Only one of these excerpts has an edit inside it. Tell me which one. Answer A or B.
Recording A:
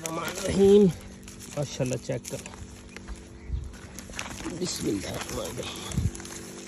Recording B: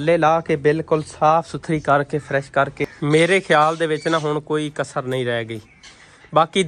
B